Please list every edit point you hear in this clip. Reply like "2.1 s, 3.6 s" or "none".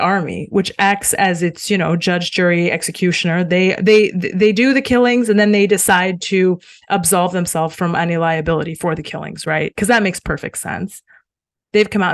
none